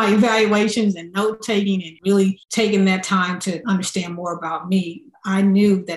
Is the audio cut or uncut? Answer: cut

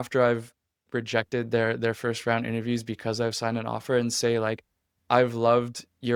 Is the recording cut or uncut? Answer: uncut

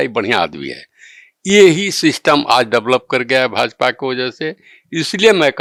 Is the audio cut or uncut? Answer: uncut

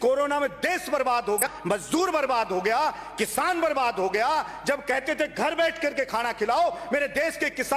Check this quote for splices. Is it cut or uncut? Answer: cut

